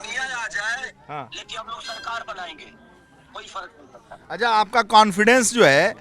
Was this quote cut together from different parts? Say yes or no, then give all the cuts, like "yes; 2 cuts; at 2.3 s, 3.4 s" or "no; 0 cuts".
no; 0 cuts